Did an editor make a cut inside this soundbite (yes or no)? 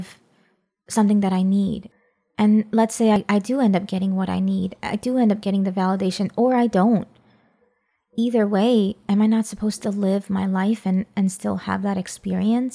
yes